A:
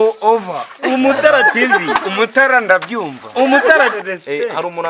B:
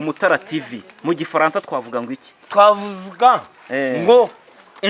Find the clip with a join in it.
A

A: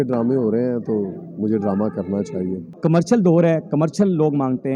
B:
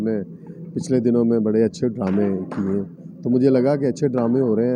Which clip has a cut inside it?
A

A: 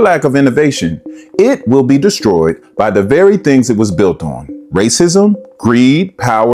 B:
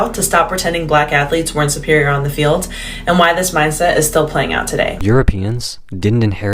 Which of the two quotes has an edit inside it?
B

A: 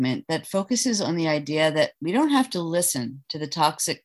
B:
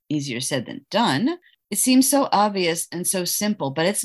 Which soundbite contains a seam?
B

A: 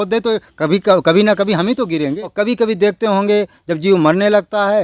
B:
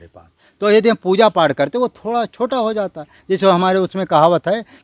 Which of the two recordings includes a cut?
A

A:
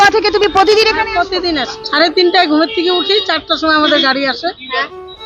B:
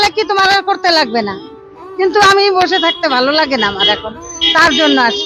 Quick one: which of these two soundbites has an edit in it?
A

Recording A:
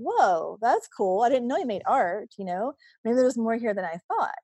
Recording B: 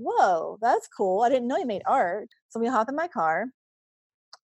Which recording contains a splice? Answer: B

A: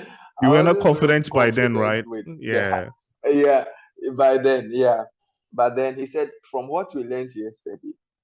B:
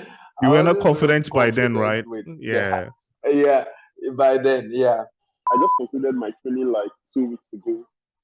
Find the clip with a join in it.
B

